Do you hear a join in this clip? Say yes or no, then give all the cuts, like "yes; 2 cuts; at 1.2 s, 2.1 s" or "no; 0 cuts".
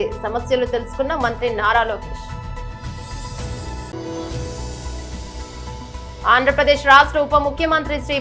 no; 0 cuts